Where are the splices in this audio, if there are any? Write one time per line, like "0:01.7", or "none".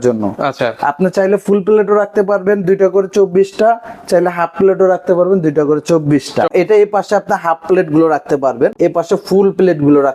0:06.5
0:08.7